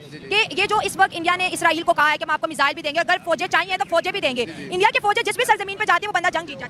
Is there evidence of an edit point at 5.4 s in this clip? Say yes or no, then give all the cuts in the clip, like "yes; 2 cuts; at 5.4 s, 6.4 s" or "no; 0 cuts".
no; 0 cuts